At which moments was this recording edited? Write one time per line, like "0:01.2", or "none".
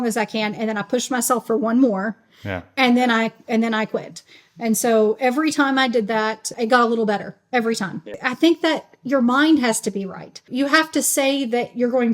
0:06.5
0:08.2
0:10.5